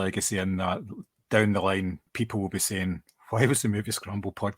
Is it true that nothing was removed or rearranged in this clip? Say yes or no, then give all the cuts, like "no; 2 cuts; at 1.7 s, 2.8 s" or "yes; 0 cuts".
no; 1 cut; at 2.0 s